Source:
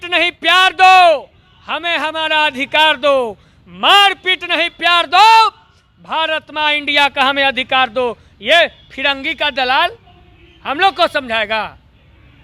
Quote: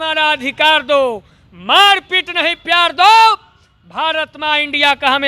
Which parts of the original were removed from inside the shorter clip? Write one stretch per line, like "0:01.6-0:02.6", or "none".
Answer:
none